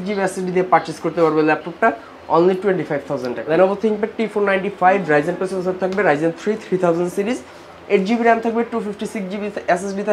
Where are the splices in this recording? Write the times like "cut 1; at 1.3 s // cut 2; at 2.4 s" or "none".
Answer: cut 1; at 3.4 s